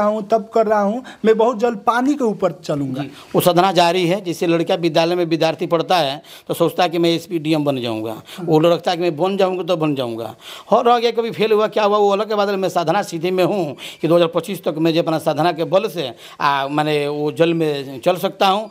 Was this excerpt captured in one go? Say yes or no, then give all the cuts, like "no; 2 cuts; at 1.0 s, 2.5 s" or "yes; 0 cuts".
yes; 0 cuts